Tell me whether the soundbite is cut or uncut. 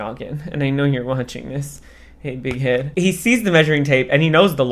uncut